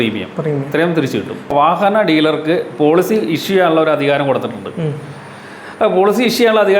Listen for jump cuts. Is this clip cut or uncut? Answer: cut